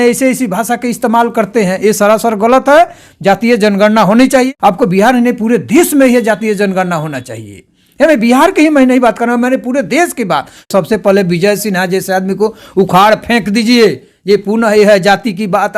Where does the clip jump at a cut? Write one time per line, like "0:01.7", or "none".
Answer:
0:04.5
0:10.7